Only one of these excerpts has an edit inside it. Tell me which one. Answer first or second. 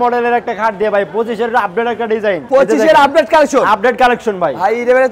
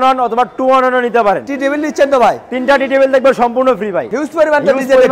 second